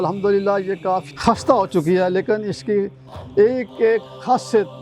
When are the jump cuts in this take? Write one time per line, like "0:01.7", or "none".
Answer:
0:01.1